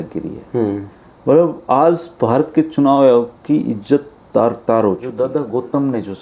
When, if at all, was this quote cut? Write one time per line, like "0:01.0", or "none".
0:05.1